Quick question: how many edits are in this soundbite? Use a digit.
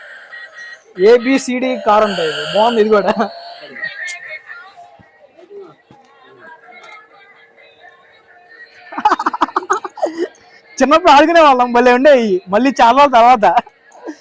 1